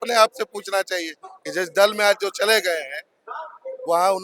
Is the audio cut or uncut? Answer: uncut